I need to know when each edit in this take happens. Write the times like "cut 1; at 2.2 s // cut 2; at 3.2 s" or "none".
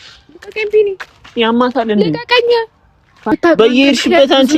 cut 1; at 3.2 s